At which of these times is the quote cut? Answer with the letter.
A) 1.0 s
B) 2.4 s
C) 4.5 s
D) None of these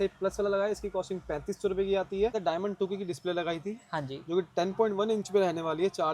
B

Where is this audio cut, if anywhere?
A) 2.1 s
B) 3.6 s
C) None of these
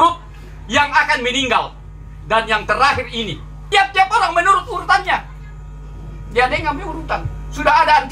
B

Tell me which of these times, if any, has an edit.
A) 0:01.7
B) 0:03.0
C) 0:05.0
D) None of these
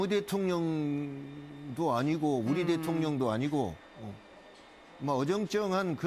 A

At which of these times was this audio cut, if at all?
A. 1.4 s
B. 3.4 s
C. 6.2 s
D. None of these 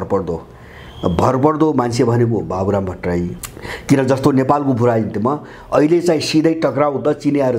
B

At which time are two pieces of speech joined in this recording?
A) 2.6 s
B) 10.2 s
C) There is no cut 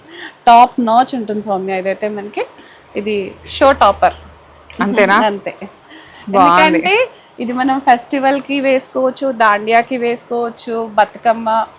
C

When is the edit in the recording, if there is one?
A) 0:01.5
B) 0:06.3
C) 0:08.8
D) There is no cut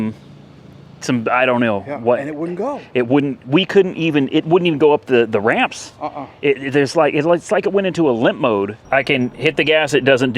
C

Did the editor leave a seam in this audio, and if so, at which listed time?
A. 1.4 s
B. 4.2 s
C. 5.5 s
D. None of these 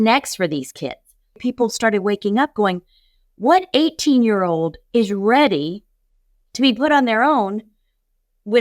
A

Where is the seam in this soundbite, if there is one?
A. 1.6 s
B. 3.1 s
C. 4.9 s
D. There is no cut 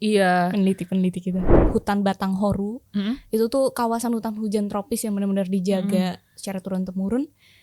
A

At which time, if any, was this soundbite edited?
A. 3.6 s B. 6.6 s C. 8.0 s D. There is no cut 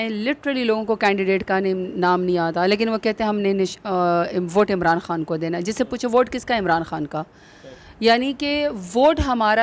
D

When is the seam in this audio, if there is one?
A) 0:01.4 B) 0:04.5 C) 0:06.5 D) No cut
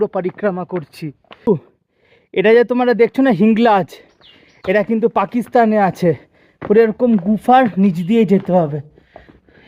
A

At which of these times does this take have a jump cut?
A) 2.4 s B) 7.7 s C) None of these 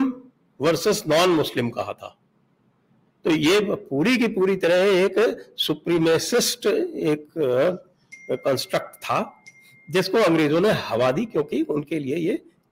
C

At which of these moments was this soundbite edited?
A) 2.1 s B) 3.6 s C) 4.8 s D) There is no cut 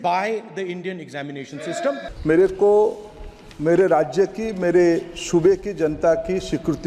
A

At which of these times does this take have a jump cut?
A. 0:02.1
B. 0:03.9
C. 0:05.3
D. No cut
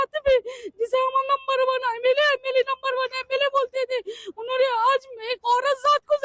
D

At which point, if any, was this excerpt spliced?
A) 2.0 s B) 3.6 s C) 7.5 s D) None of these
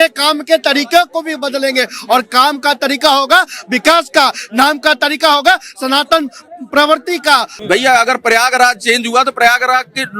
C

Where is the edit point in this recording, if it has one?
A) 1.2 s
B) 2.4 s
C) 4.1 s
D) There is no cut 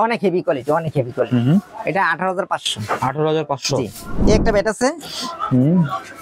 C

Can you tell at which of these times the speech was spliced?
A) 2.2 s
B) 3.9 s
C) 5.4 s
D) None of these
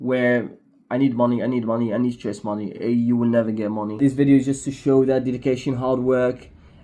B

